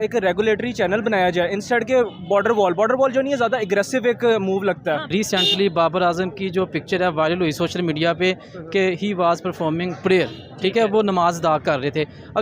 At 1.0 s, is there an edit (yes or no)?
no